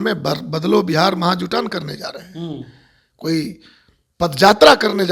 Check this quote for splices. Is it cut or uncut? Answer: uncut